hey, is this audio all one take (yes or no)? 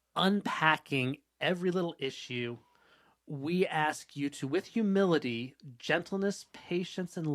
yes